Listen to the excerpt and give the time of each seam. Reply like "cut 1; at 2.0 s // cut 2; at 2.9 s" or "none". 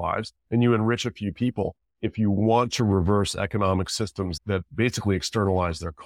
cut 1; at 1.8 s // cut 2; at 4.4 s